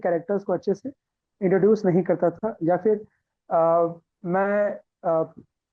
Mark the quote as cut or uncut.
uncut